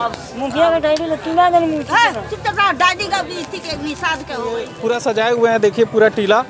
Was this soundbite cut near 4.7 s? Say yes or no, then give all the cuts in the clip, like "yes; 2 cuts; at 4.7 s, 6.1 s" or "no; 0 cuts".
yes; 1 cut; at 4.7 s